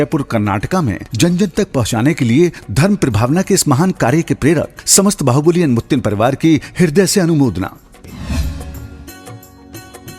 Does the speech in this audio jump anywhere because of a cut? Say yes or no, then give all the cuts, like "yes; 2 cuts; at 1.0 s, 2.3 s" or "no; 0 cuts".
no; 0 cuts